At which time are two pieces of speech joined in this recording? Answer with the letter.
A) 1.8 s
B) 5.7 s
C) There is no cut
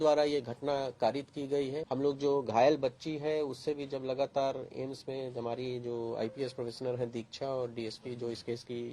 A